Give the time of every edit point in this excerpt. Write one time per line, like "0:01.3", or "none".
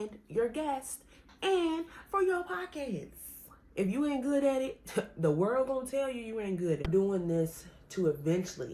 0:03.6
0:06.9